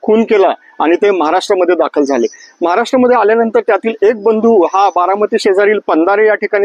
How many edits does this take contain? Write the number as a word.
zero